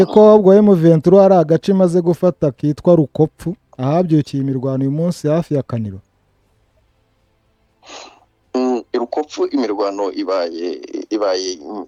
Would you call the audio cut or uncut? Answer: uncut